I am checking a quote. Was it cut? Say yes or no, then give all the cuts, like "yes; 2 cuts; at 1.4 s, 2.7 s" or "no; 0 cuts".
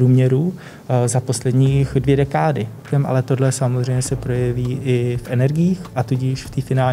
yes; 1 cut; at 2.8 s